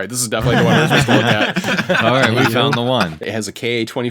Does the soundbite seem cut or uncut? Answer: cut